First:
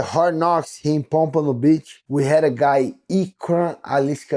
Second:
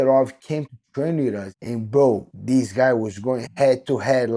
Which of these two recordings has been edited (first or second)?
second